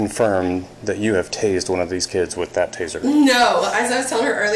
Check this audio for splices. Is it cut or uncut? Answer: uncut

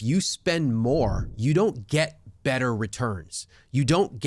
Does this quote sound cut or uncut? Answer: cut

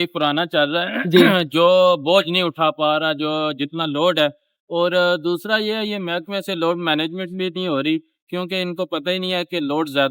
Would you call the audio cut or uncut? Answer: uncut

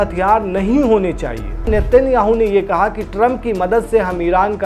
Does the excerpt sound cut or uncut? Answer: cut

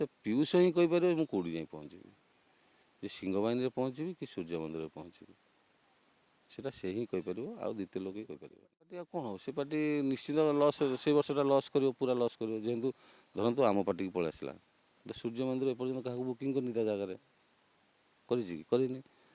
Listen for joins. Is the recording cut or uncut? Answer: cut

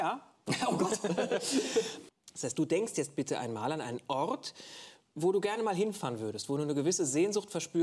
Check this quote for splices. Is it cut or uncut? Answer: cut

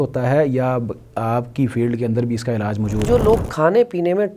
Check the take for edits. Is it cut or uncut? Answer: cut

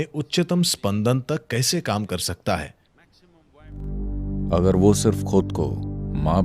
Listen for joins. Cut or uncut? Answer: cut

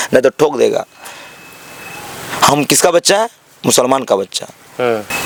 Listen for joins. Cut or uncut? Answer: uncut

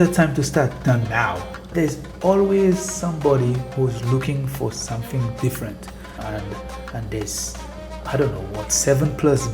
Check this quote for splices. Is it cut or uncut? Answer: cut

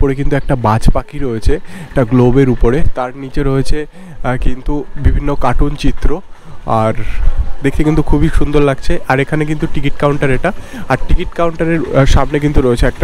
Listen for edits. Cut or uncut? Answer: uncut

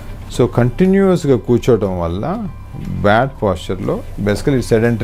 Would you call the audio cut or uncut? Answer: uncut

